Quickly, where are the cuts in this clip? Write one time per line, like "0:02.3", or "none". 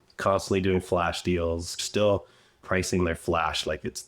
0:01.7

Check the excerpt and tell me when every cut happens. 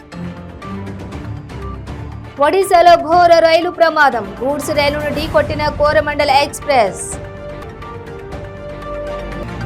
0:00.9

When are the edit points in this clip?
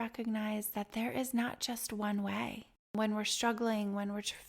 0:02.9

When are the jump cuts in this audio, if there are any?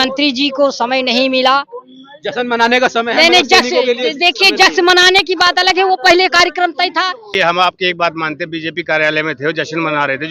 0:07.2

